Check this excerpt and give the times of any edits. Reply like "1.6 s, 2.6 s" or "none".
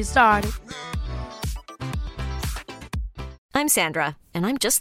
3.4 s